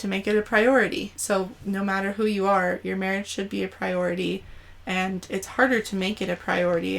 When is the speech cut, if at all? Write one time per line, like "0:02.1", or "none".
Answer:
0:01.1